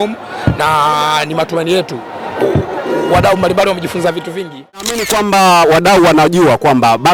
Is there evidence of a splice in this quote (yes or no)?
yes